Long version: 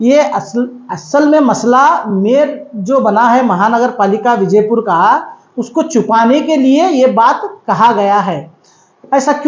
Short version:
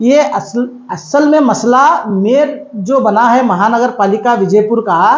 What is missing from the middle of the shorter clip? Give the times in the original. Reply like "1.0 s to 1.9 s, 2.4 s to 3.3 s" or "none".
none